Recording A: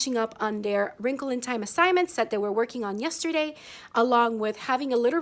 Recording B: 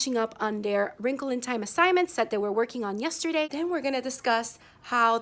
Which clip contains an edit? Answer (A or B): B